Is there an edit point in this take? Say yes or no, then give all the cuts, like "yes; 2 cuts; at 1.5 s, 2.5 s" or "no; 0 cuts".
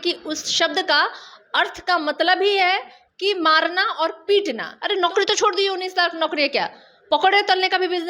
yes; 1 cut; at 4.7 s